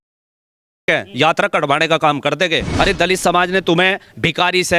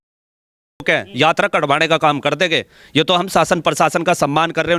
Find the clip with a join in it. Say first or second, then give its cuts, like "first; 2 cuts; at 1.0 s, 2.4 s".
first; 1 cut; at 2.6 s